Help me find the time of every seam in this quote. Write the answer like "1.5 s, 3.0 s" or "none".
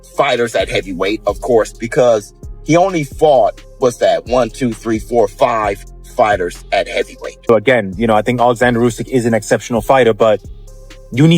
7.3 s